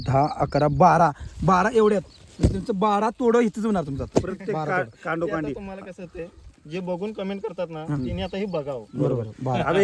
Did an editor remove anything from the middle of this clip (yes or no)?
no